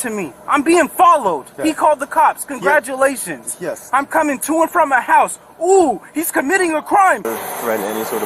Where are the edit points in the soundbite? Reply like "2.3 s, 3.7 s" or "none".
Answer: 7.3 s

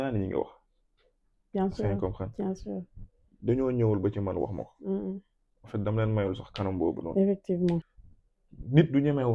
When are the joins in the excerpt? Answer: 7.9 s

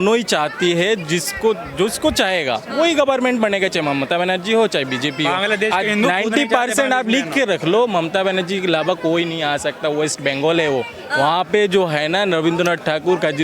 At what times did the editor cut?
none

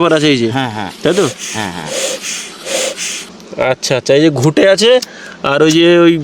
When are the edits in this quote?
3.2 s

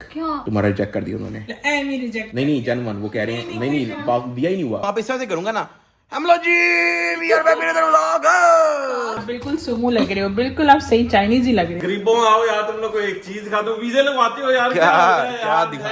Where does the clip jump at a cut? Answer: 4.8 s, 9.1 s, 11.9 s

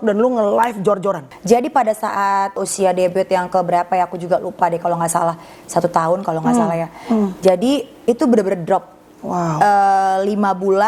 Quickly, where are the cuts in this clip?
1.3 s, 2.7 s

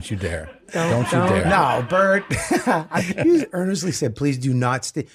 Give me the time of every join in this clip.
2.9 s

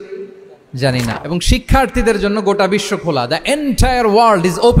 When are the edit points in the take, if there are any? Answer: 1.1 s

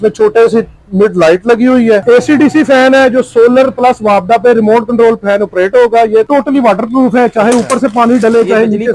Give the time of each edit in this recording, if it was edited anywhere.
2.0 s, 6.3 s

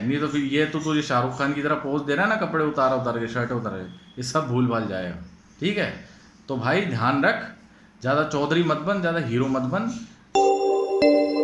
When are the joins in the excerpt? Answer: 10.1 s

